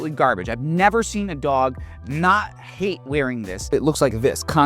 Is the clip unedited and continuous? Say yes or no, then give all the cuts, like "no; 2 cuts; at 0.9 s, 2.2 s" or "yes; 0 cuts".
no; 1 cut; at 3.7 s